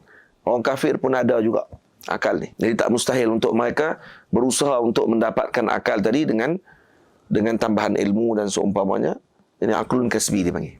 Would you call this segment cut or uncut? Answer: cut